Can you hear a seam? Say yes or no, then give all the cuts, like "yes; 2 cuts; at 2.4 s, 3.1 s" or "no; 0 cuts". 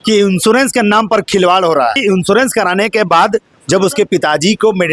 yes; 1 cut; at 2.0 s